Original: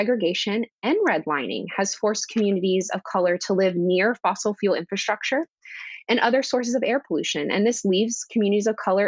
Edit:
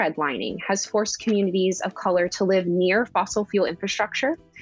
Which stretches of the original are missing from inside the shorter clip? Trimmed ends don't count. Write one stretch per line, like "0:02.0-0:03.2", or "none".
none